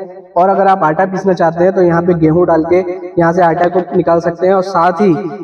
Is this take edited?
no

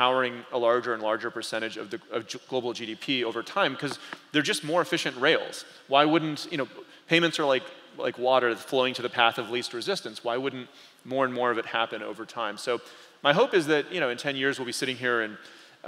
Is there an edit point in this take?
no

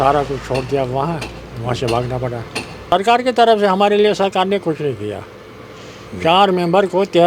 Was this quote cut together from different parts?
yes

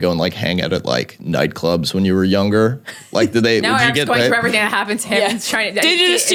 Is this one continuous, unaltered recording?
yes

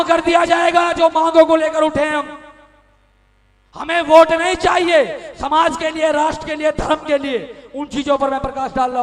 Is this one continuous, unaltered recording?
yes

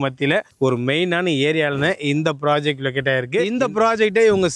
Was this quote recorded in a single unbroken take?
no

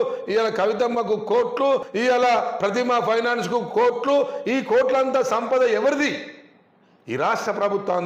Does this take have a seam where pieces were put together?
yes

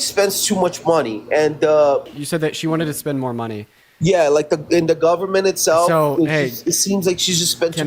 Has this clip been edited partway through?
yes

